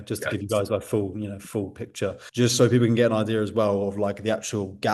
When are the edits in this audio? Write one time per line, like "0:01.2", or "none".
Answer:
0:02.2